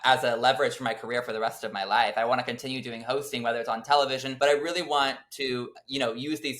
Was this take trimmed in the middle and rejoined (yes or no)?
yes